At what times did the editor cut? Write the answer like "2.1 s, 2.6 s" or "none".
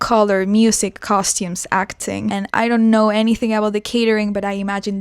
2.5 s